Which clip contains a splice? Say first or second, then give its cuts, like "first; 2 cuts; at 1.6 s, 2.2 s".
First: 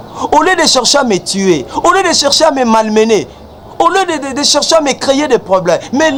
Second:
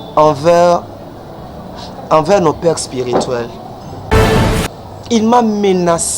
second; 1 cut; at 4.4 s